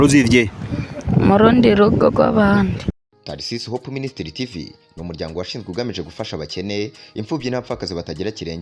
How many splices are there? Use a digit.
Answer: 1